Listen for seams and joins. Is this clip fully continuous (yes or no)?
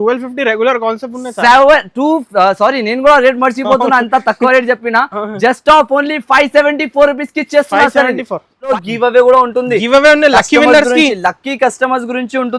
no